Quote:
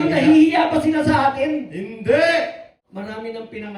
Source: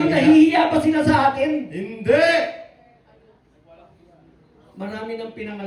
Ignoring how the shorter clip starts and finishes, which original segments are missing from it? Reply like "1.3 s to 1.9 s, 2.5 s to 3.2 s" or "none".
2.7 s to 4.6 s